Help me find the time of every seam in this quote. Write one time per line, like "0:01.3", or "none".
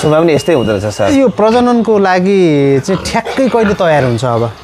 0:01.1